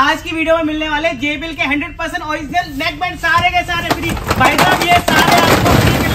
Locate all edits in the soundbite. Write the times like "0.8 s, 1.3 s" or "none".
none